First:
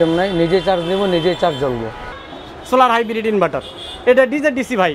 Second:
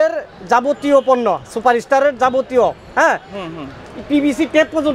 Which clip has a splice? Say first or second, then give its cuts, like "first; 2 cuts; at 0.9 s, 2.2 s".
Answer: first; 1 cut; at 2.2 s